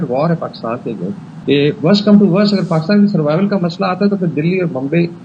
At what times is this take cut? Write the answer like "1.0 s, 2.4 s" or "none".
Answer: 1.3 s